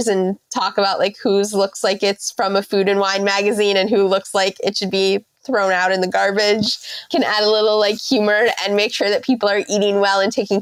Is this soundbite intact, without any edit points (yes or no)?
yes